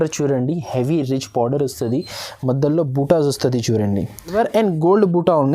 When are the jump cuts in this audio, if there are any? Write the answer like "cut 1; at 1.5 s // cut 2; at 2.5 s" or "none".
cut 1; at 4.3 s